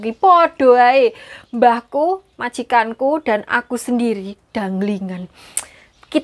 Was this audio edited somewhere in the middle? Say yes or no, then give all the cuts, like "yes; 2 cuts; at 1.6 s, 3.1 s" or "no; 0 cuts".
no; 0 cuts